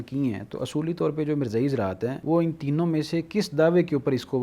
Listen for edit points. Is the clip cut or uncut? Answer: cut